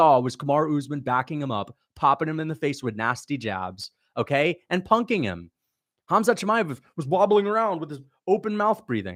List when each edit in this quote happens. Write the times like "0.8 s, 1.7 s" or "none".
none